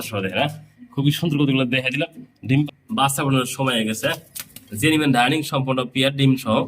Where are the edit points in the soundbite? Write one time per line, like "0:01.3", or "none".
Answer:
0:02.8